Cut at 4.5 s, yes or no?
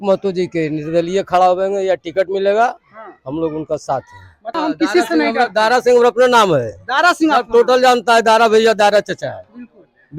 yes